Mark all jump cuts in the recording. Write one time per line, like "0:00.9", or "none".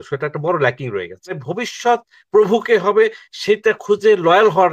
0:01.5